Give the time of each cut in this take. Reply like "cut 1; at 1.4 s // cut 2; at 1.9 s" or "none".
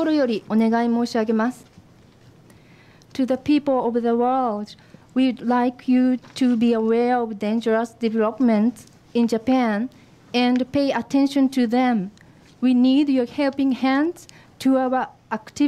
none